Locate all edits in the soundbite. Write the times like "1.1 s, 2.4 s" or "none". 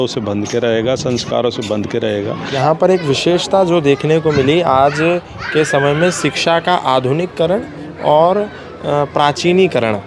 2.6 s